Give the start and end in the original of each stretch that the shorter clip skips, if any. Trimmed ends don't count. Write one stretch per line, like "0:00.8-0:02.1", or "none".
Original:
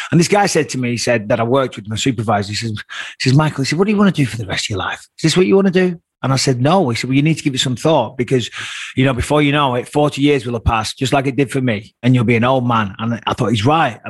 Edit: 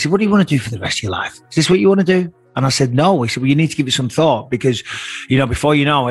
none